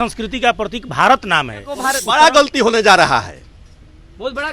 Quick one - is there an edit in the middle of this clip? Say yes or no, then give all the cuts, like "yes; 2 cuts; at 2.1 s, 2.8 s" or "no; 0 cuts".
yes; 1 cut; at 1.8 s